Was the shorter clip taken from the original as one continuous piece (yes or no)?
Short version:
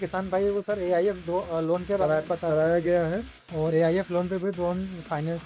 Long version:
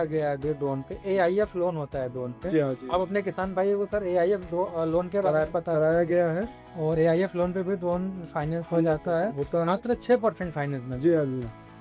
yes